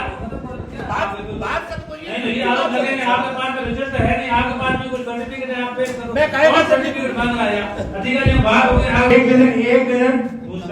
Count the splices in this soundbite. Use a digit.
1